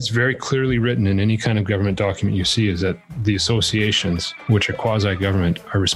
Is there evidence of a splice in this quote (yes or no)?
no